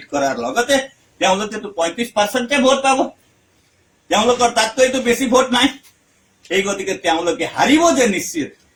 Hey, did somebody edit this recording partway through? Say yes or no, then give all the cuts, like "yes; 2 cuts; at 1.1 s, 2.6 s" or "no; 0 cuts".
no; 0 cuts